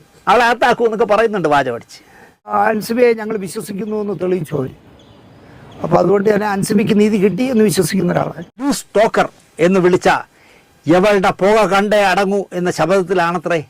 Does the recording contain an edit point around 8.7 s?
yes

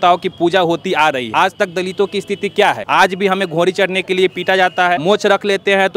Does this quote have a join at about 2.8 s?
yes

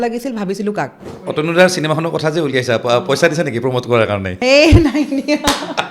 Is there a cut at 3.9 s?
no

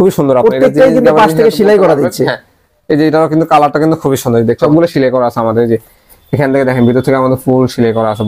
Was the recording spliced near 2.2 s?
no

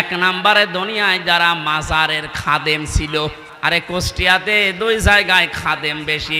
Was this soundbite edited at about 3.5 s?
yes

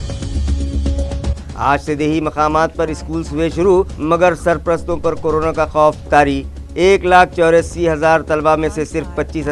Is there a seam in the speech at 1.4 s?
yes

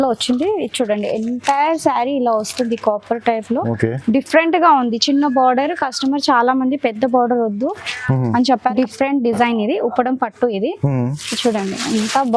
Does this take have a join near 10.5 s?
no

